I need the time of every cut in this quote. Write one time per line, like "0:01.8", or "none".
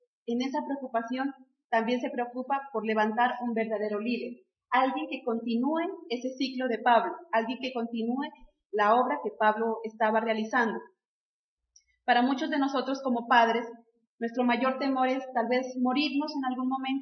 none